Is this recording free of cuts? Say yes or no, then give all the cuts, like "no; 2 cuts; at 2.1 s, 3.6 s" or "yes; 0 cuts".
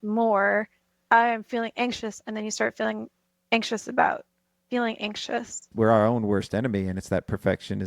no; 2 cuts; at 0.9 s, 5.6 s